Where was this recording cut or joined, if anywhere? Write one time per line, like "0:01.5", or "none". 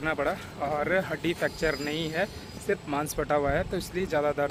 none